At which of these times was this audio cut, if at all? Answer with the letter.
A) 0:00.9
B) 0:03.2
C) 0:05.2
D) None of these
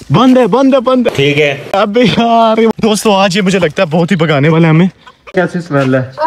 C